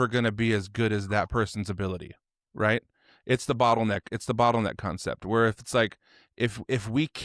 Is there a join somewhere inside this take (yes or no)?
no